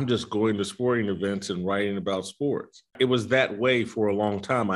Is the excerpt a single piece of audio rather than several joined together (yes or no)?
no